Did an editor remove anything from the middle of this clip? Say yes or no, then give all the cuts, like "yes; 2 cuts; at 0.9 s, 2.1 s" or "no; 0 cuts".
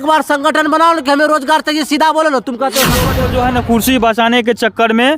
yes; 1 cut; at 3.1 s